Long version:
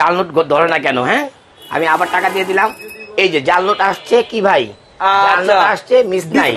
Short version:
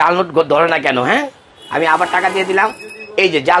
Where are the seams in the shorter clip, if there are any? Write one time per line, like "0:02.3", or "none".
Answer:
none